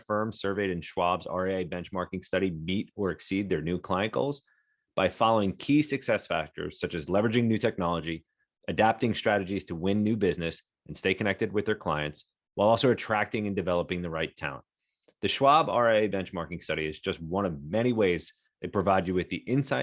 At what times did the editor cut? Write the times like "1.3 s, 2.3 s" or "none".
none